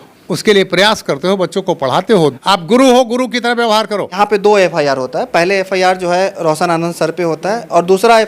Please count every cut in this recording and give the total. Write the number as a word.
two